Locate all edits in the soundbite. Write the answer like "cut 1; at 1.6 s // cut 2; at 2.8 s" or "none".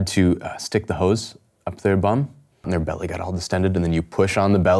cut 1; at 2.7 s